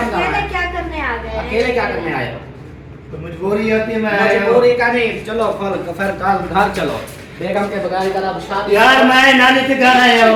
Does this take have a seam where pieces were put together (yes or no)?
no